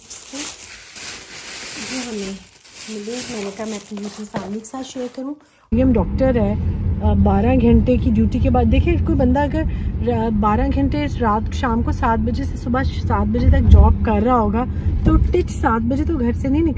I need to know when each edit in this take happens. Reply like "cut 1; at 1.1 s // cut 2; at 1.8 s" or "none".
cut 1; at 5.7 s